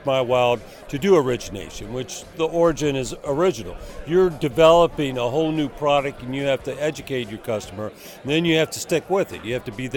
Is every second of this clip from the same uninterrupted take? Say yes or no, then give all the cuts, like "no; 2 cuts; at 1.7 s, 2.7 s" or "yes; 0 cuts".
yes; 0 cuts